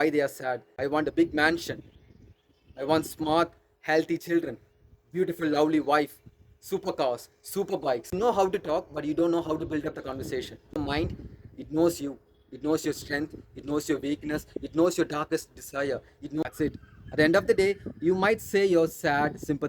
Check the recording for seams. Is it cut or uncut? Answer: cut